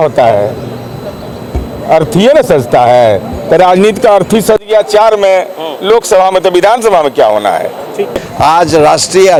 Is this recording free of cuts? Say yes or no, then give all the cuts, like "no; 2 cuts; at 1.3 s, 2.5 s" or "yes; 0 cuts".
yes; 0 cuts